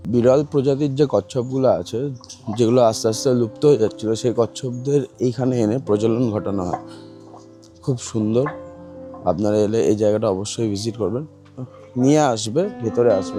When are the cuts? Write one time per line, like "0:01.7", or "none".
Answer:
none